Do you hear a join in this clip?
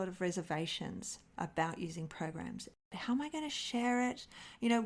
yes; 1 cut; at 2.8 s

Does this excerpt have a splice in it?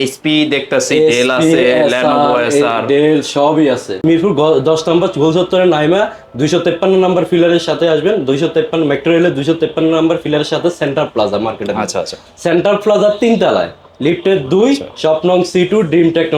yes; 1 cut; at 3.9 s

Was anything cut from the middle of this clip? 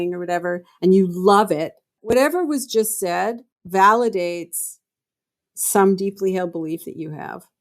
yes; 2 cuts; at 2.1 s, 3.5 s

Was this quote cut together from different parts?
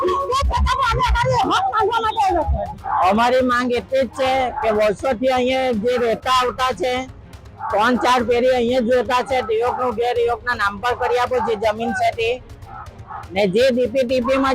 no; 0 cuts

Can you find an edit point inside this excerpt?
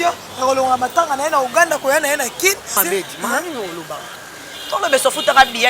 yes; 1 cut; at 2.8 s

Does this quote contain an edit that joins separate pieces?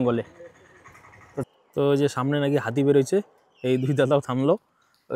yes; 1 cut; at 1.5 s

